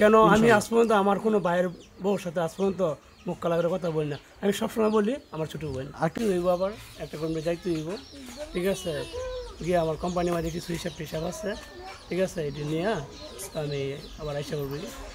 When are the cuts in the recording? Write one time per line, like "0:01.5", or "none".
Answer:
0:06.1